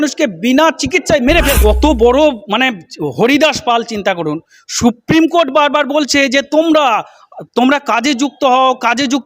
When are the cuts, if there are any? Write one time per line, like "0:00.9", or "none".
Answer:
0:01.6

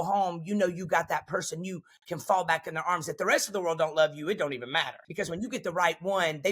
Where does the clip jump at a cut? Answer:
0:05.0

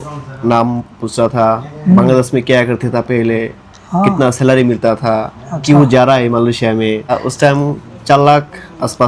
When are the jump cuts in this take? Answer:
0:07.1

